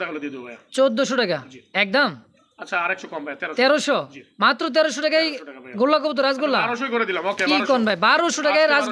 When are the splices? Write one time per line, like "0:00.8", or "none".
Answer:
none

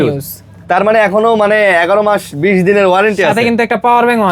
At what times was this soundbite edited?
none

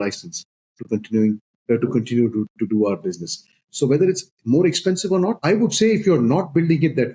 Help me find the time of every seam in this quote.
0:03.7
0:05.4

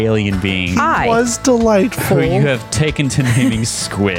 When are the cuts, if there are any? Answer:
0:03.1

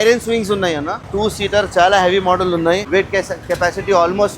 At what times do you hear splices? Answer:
0:01.0
0:02.8

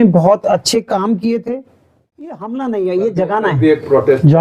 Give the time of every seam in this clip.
0:02.3

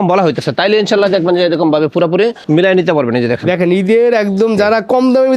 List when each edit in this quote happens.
none

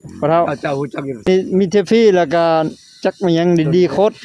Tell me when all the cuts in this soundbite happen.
0:01.3

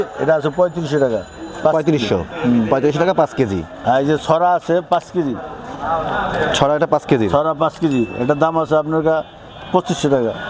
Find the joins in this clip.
none

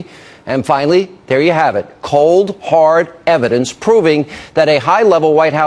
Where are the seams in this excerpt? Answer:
0:01.6

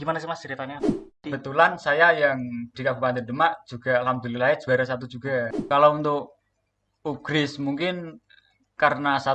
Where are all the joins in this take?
0:01.1
0:05.5

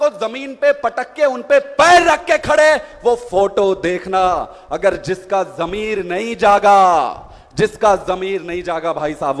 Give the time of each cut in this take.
none

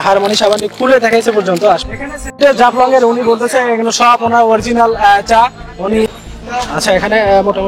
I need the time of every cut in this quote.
0:01.9
0:06.1

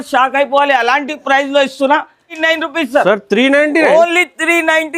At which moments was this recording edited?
0:02.4

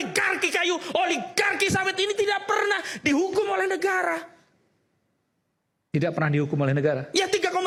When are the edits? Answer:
none

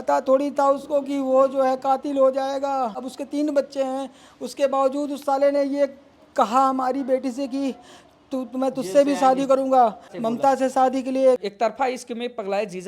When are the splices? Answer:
0:03.1
0:10.1
0:11.4

